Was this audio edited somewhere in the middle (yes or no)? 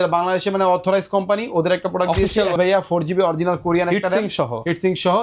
yes